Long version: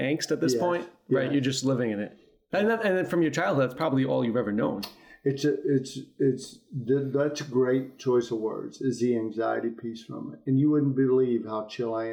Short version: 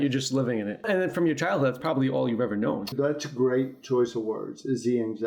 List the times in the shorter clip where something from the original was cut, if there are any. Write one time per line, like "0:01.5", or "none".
0:00.8
0:02.9